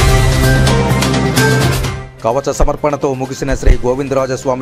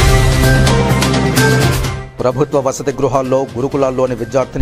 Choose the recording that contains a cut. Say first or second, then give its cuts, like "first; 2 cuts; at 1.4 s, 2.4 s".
second; 1 cut; at 1.5 s